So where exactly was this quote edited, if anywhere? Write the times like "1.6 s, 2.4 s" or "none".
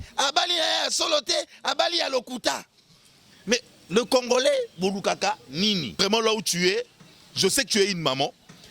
5.9 s